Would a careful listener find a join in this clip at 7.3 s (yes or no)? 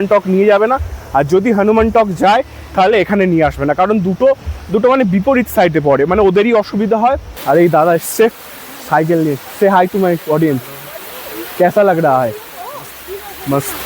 yes